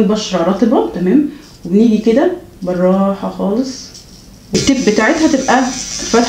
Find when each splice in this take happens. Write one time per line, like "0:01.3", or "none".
0:04.6